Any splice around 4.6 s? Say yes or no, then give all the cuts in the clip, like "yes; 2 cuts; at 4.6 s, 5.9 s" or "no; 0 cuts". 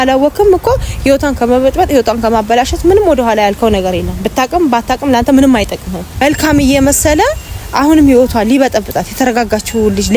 no; 1 cut; at 6.2 s